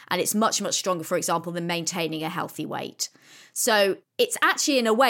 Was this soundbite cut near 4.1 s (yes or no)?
yes